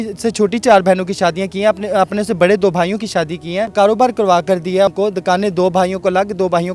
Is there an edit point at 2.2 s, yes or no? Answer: no